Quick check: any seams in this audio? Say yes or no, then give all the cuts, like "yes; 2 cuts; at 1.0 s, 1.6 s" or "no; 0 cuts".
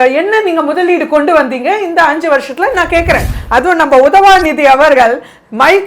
yes; 1 cut; at 3.3 s